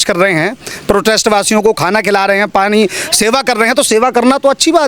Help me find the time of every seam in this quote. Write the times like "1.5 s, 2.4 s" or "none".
none